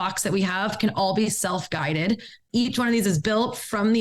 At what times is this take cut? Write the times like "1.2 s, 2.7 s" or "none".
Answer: 2.4 s